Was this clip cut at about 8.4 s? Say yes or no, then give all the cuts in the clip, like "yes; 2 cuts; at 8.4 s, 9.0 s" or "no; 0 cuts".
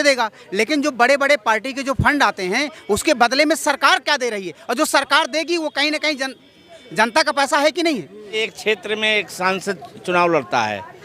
yes; 1 cut; at 8.4 s